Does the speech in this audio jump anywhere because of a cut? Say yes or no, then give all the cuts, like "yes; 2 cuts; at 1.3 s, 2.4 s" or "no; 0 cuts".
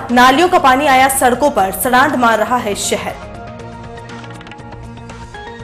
yes; 1 cut; at 3.1 s